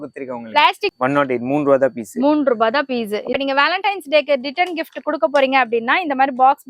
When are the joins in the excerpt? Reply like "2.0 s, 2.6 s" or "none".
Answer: 0.9 s, 3.3 s